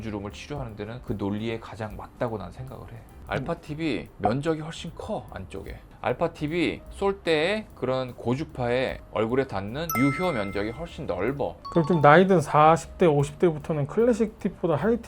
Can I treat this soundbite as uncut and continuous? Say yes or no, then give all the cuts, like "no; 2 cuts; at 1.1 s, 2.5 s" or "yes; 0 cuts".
no; 2 cuts; at 3.1 s, 11.6 s